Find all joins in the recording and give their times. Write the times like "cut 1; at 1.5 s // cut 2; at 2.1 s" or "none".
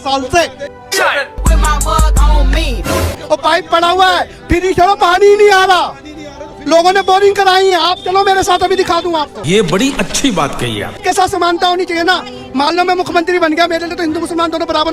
none